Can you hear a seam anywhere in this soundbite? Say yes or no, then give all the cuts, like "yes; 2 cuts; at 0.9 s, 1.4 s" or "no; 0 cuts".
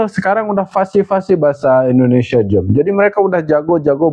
no; 0 cuts